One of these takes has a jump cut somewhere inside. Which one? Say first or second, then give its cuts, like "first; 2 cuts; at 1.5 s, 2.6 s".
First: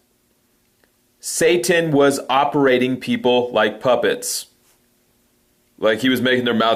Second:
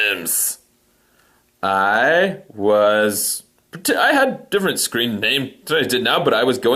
second; 1 cut; at 1.4 s